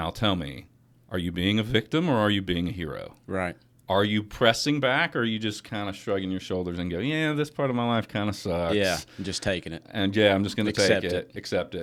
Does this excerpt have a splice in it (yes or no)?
no